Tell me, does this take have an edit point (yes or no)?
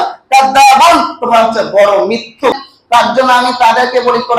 yes